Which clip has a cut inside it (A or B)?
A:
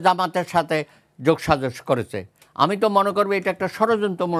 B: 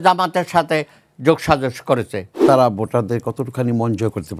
B